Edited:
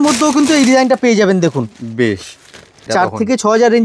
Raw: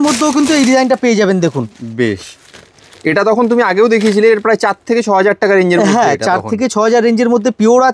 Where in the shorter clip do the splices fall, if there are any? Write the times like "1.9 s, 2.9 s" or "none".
2.9 s